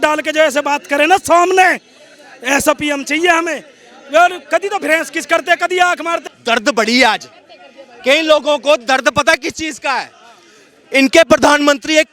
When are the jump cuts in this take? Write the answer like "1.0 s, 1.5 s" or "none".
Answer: 6.3 s